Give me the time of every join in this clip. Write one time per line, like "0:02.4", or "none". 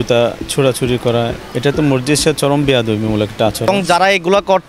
0:01.4
0:03.7